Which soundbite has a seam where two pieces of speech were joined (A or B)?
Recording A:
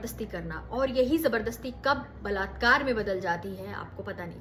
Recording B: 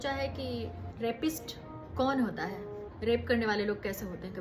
B